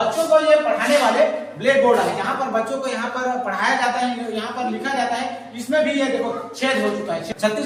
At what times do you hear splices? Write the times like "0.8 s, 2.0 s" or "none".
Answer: none

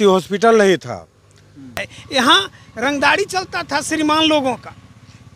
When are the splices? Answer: 1.9 s

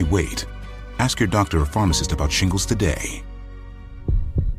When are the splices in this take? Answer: 3.2 s

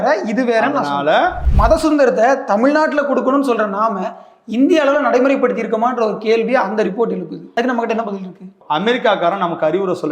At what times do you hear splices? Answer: 1.4 s, 7.4 s, 8.5 s

